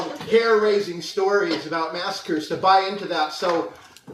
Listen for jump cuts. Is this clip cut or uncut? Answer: uncut